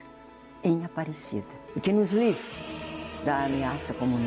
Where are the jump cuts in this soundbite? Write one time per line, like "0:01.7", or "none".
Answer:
0:01.6